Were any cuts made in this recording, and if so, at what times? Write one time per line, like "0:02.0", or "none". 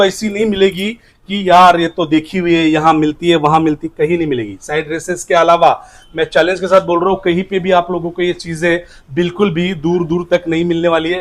none